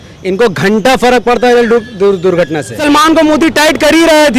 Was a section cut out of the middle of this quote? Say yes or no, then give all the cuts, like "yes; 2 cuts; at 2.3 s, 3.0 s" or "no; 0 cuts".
yes; 1 cut; at 2.8 s